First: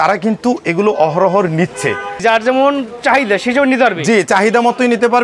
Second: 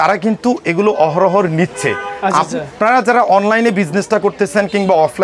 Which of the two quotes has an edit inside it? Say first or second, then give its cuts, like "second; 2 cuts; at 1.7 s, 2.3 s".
first; 1 cut; at 2.1 s